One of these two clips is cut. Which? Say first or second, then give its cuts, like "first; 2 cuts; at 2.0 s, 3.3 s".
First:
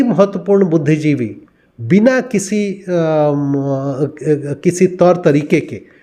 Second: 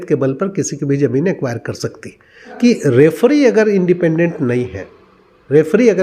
second; 1 cut; at 2.5 s